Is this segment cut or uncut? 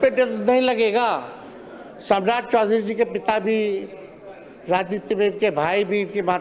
uncut